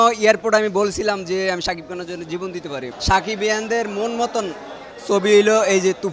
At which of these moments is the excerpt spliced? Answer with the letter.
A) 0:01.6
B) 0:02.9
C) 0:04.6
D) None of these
D